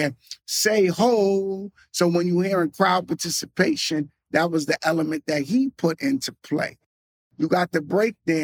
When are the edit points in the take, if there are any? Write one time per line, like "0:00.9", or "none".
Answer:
0:07.2